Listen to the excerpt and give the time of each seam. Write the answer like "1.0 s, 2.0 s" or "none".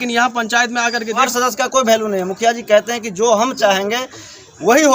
1.2 s